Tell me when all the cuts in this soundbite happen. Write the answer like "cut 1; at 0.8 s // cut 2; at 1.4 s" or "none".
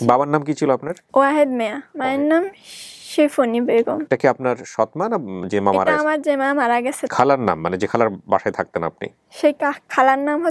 cut 1; at 1.0 s // cut 2; at 1.8 s // cut 3; at 4.0 s // cut 4; at 7.1 s